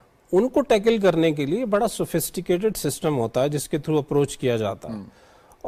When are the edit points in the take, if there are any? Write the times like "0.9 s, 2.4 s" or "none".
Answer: none